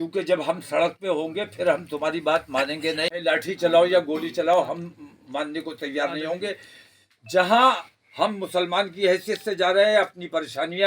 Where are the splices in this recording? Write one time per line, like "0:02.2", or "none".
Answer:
0:03.2